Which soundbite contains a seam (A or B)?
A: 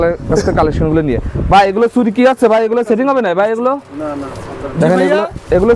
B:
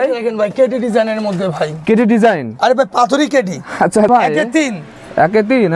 B